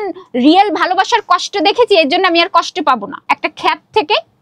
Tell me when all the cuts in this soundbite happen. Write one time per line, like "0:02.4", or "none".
0:03.1